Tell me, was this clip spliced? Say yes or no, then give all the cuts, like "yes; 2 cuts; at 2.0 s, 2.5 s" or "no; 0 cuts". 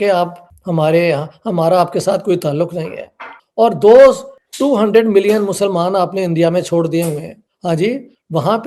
no; 0 cuts